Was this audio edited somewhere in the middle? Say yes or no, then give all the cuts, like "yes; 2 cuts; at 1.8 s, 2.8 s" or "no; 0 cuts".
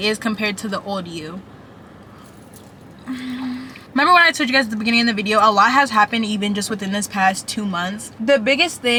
no; 0 cuts